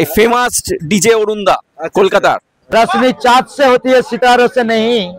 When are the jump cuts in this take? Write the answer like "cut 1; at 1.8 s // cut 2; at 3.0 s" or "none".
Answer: cut 1; at 2.5 s